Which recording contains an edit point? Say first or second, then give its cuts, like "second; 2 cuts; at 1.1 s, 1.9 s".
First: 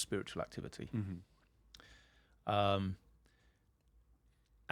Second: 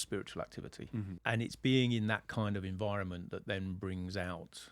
second; 1 cut; at 1.1 s